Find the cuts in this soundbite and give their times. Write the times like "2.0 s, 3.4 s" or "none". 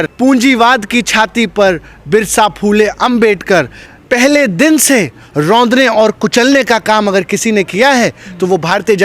3.8 s